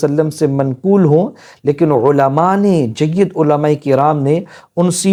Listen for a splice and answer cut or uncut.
uncut